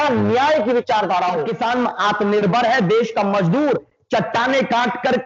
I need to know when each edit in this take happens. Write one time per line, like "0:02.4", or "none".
0:01.5